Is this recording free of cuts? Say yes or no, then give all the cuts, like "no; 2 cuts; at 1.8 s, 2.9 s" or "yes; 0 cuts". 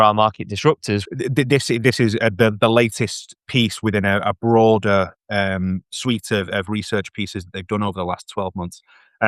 no; 1 cut; at 1.0 s